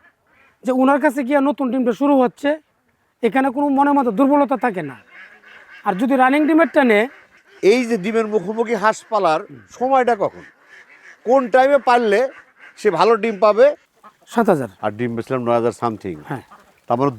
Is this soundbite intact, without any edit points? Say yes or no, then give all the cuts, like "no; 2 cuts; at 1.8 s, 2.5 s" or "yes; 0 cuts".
no; 2 cuts; at 7.4 s, 13.9 s